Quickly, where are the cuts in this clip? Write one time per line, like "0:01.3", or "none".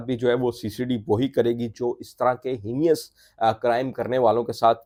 none